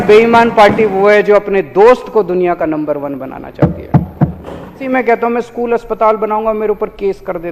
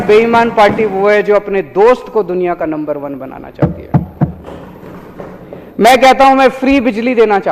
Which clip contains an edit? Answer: first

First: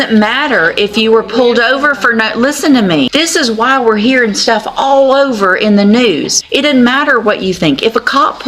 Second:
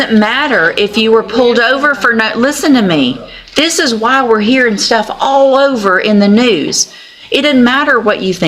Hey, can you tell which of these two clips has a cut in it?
first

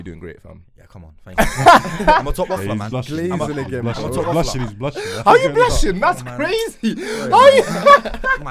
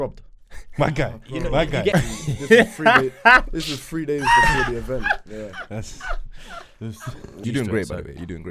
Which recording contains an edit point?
second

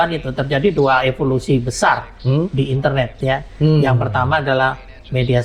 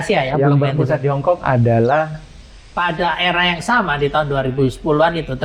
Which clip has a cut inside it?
second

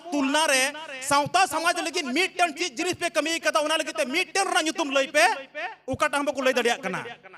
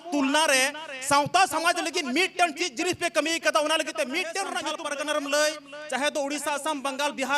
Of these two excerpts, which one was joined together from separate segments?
second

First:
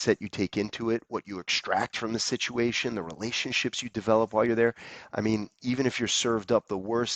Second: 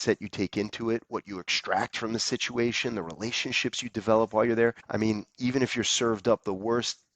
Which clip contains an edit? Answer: second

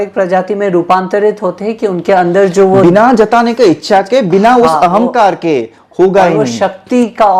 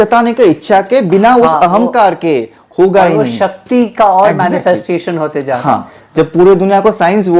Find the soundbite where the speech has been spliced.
second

